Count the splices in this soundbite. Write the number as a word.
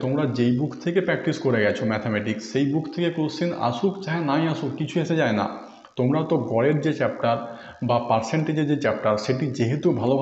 zero